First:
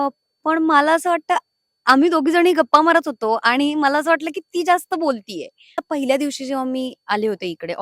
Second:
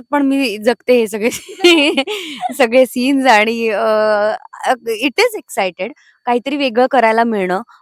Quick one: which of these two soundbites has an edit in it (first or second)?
first